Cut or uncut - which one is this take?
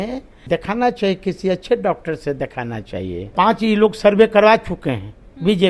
cut